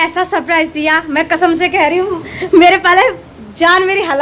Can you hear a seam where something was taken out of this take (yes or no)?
no